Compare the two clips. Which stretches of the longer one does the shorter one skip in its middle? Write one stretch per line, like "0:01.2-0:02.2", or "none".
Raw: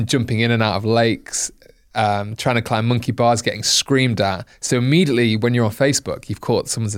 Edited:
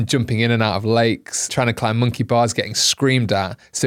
0:01.4-0:02.3